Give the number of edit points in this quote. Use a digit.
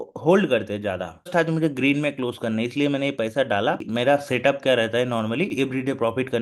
3